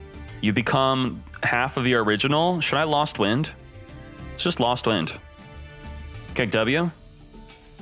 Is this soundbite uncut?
yes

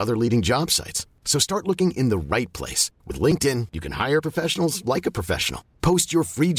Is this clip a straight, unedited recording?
yes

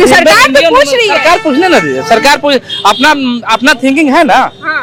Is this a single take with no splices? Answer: yes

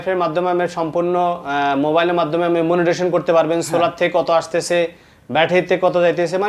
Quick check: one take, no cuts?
yes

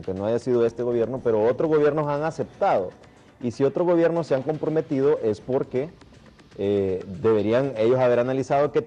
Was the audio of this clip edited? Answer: no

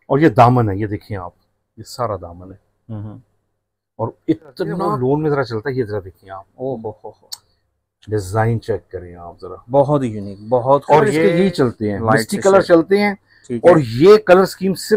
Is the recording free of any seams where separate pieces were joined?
no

